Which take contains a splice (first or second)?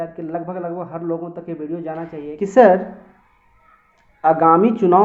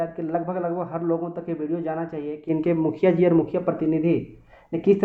first